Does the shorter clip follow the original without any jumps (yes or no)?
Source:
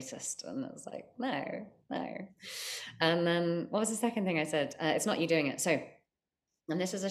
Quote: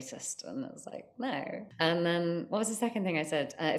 no